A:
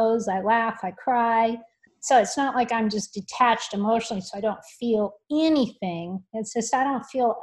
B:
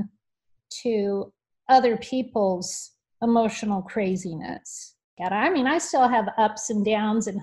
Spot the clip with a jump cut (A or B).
B